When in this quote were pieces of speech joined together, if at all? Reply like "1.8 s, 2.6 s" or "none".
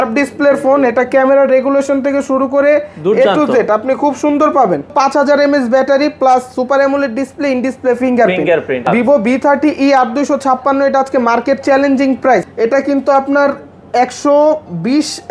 4.9 s, 8.9 s, 12.5 s